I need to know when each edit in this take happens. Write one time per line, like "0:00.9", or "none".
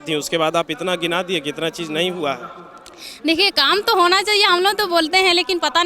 none